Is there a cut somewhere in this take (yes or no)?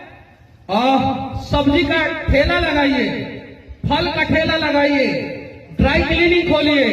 no